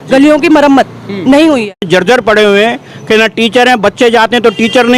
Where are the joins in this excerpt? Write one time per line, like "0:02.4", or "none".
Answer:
0:01.9